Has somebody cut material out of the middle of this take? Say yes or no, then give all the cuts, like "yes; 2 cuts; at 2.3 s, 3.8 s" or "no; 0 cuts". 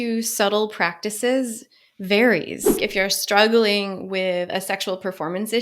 yes; 1 cut; at 2.8 s